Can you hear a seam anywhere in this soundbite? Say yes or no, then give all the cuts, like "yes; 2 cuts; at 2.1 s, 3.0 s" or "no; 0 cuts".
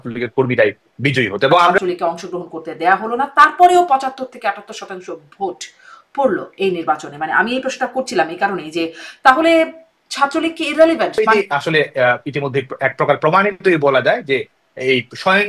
yes; 2 cuts; at 1.7 s, 11.2 s